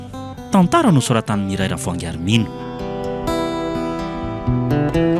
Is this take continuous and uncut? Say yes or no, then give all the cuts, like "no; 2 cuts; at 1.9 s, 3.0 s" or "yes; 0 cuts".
no; 1 cut; at 2.6 s